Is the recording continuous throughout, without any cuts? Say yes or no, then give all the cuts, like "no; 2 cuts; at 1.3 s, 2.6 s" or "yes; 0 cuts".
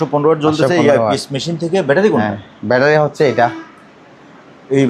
yes; 0 cuts